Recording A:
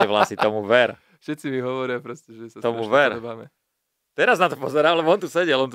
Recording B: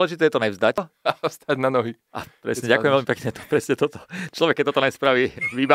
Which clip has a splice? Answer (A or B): B